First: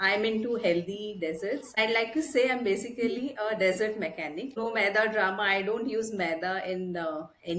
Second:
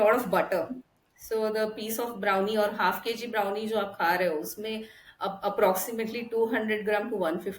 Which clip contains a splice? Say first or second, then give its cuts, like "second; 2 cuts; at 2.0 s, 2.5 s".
first; 2 cuts; at 1.8 s, 4.6 s